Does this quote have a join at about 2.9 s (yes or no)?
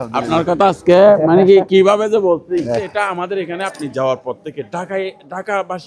yes